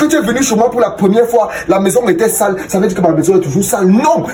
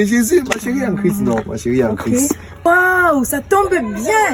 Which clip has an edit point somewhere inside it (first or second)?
second